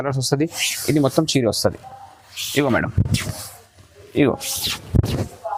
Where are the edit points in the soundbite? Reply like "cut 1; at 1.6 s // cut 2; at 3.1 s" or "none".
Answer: none